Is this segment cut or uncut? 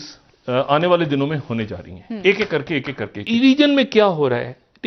cut